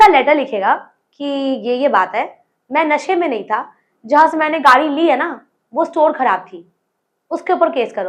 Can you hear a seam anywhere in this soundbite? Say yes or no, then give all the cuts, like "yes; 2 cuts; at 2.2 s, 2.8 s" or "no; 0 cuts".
no; 0 cuts